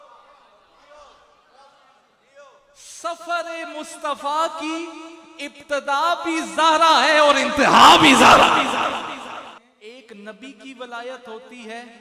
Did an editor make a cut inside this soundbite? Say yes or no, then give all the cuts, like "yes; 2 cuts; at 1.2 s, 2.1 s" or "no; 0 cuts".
yes; 1 cut; at 9.5 s